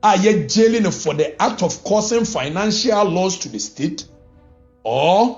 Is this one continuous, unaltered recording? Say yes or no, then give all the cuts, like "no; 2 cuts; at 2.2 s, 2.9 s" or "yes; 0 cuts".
yes; 0 cuts